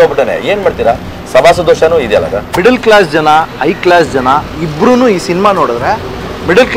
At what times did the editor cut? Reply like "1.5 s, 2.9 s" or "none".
2.4 s